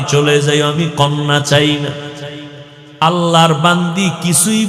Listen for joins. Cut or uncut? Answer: uncut